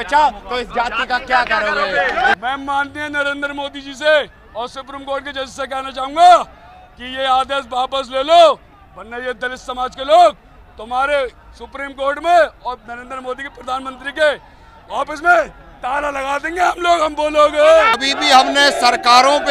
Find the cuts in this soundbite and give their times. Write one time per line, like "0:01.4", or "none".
0:02.4
0:18.0